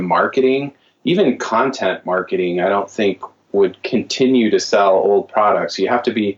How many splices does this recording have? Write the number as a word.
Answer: zero